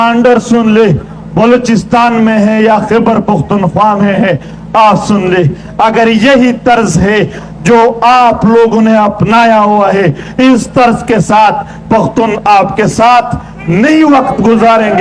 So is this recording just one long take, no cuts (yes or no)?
yes